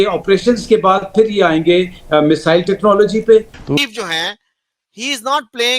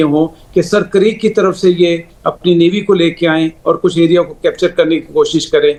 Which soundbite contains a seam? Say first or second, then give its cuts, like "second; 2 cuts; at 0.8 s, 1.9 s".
first; 1 cut; at 3.6 s